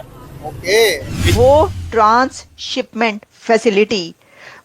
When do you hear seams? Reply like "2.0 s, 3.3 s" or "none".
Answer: 1.2 s